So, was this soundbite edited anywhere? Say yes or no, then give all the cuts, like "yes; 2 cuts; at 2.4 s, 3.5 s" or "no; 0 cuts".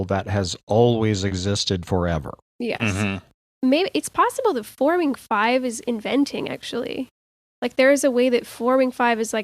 yes; 1 cut; at 3.3 s